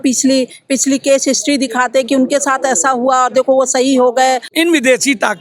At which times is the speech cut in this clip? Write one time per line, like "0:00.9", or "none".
0:04.5